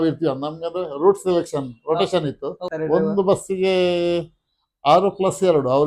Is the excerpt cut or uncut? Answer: cut